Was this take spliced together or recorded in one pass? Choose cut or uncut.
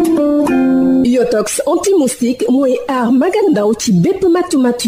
cut